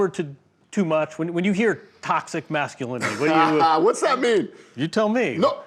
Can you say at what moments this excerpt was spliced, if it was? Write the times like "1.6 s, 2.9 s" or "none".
none

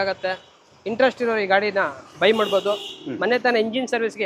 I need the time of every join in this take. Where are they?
none

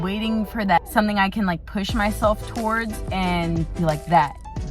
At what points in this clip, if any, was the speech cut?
0.8 s, 3.0 s, 3.7 s

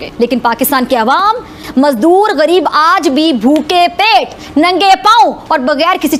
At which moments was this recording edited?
none

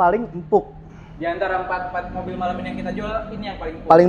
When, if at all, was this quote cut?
none

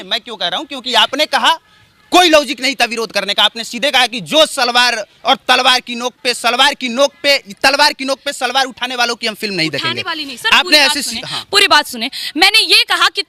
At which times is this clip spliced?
none

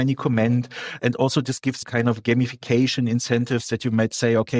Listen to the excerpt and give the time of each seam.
1.8 s

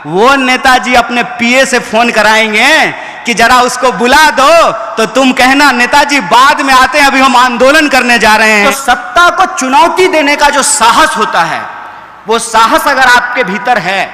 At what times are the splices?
8.5 s

